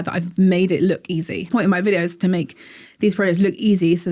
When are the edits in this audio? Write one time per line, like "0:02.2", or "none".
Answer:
0:01.5